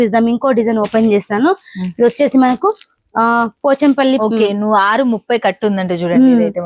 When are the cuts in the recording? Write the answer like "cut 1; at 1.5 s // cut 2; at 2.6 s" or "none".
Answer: cut 1; at 4.2 s

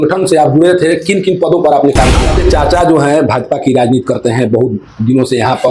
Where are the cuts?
cut 1; at 2.2 s

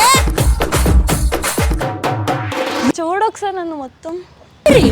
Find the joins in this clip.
cut 1; at 3.0 s

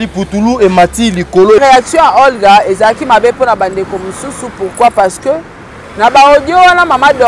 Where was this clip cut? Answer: cut 1; at 1.6 s

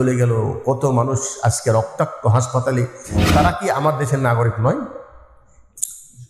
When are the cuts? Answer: cut 1; at 3.2 s

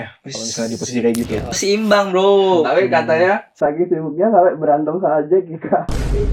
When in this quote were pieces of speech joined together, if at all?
cut 1; at 1.6 s

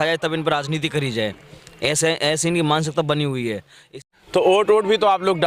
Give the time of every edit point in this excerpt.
cut 1; at 3.9 s

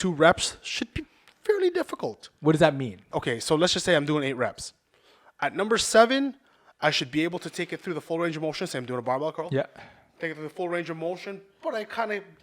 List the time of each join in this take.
cut 1; at 3.0 s

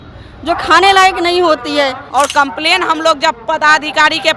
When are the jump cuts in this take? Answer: cut 1; at 2.0 s

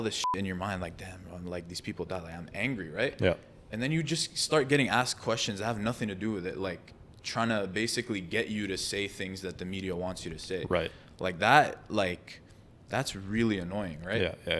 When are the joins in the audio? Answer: none

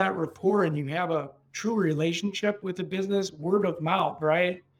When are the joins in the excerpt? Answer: cut 1; at 2.6 s

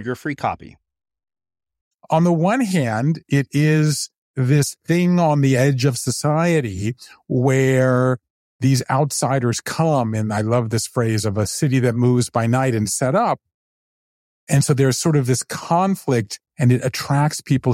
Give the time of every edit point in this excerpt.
cut 1; at 1.9 s

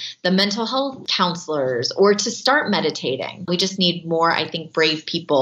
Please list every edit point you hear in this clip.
cut 1; at 1.0 s // cut 2; at 3.5 s

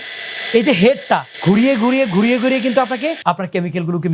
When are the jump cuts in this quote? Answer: cut 1; at 1.3 s // cut 2; at 3.2 s

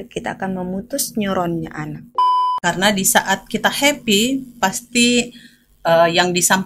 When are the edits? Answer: cut 1; at 2.5 s

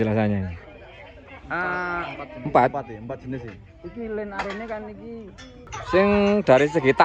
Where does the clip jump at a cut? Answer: cut 1; at 5.7 s

